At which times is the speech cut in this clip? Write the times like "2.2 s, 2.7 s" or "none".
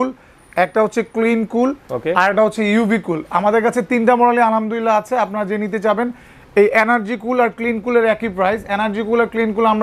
none